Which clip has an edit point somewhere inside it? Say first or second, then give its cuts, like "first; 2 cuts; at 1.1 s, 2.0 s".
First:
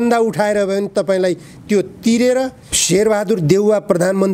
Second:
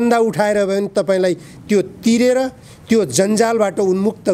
first; 1 cut; at 2.7 s